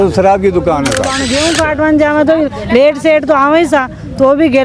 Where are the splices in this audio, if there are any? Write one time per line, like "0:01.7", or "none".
0:01.1